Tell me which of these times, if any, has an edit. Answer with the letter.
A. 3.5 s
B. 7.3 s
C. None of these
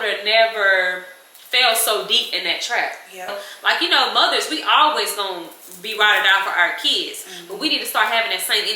A